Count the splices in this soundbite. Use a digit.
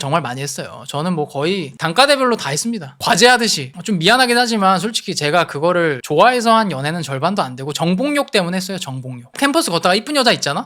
3